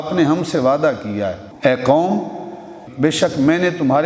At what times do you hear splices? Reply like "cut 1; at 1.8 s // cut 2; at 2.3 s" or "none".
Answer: cut 1; at 1.4 s // cut 2; at 2.8 s